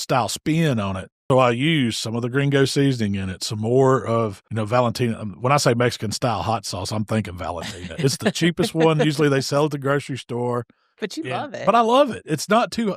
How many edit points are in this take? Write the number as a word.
two